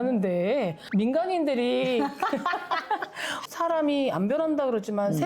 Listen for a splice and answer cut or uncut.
cut